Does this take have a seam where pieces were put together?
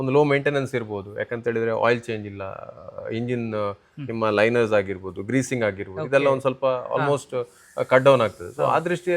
no; 0 cuts

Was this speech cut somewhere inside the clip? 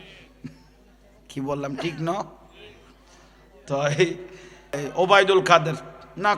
yes; 1 cut; at 4.8 s

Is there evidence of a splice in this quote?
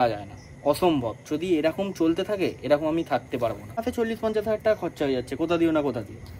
yes; 1 cut; at 3.8 s

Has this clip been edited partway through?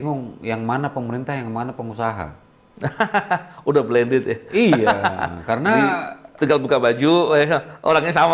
no; 0 cuts

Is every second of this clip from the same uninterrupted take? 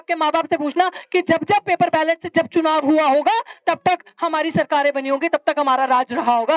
yes; 0 cuts

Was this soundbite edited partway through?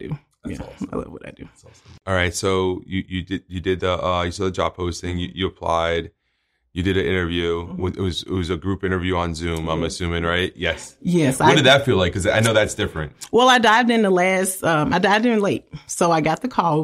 no; 0 cuts

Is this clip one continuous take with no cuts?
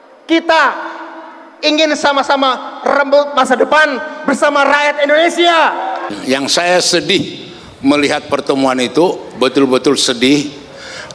no; 1 cut; at 6.2 s

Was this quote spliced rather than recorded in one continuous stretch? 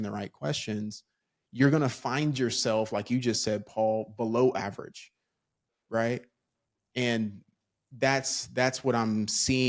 no; 0 cuts

